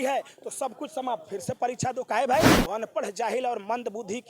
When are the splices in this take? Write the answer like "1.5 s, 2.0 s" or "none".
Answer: 2.6 s